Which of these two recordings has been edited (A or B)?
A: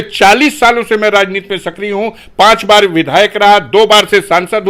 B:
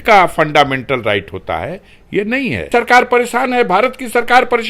B